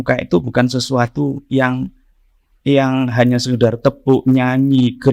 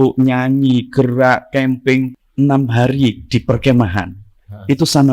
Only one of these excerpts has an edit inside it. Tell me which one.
second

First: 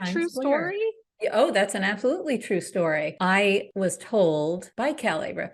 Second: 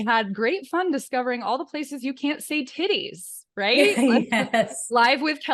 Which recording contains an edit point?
first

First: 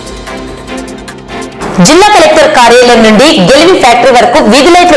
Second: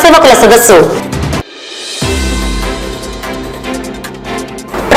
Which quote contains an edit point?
first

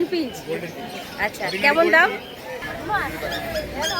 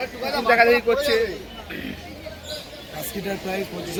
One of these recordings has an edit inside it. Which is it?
first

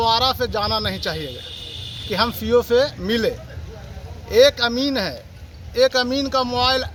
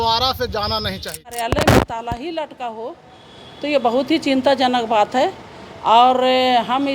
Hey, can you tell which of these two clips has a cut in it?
second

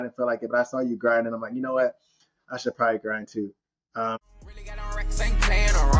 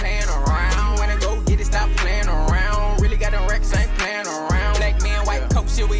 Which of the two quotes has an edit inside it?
first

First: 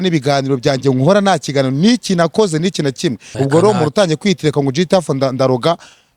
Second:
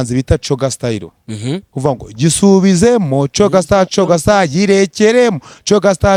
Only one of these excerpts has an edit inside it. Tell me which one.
first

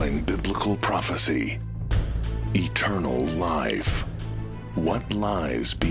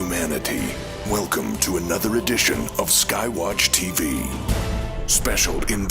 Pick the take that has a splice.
second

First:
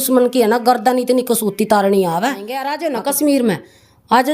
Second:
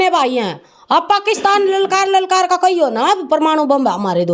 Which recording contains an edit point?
first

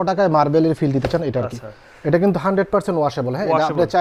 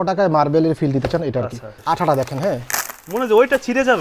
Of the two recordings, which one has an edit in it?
second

